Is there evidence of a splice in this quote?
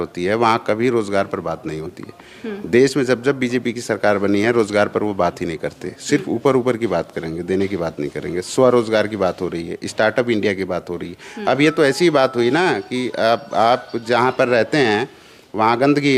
no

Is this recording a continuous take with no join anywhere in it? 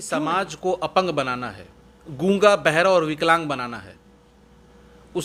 yes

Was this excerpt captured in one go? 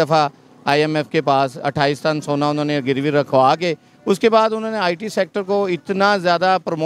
yes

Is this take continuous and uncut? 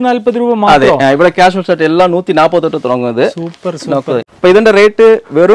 no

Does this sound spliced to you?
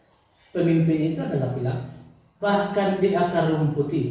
yes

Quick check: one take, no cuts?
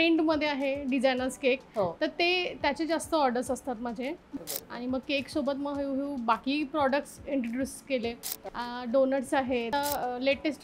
no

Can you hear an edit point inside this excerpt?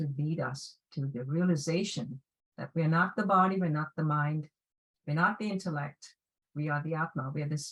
no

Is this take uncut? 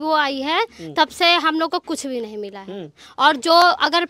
yes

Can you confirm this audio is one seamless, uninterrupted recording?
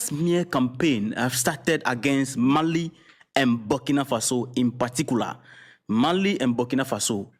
yes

